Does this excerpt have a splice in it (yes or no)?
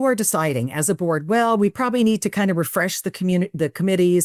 no